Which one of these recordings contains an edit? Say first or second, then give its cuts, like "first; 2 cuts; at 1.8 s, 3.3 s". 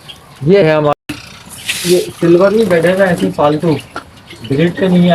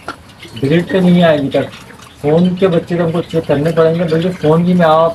first; 1 cut; at 1.0 s